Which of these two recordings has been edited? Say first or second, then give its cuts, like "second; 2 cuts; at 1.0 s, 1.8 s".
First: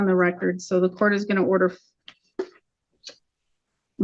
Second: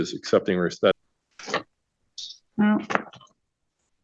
second; 1 cut; at 1.1 s